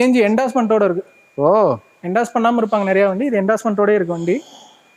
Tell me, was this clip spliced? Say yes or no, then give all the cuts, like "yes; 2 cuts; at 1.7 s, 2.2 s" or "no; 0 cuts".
no; 0 cuts